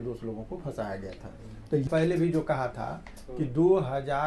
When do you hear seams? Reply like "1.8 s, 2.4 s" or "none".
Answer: 1.9 s